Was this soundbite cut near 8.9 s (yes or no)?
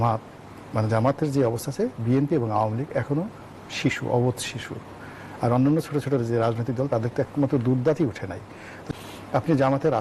yes